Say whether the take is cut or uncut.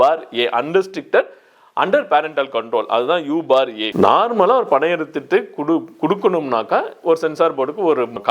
cut